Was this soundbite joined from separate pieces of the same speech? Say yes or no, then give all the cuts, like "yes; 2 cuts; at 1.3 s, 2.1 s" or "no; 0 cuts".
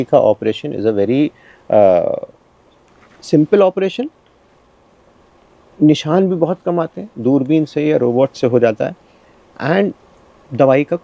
no; 0 cuts